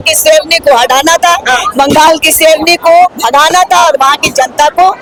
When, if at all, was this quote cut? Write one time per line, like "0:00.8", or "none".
none